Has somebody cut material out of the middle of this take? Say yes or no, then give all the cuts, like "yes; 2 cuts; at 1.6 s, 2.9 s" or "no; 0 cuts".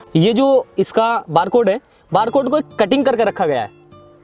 no; 0 cuts